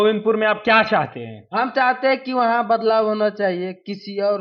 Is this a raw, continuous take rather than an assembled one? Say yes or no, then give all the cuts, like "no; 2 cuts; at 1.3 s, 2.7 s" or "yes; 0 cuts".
yes; 0 cuts